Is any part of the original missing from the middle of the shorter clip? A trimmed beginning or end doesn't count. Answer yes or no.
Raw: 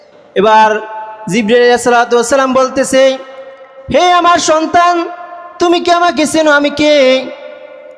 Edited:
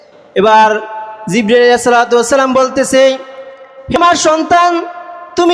yes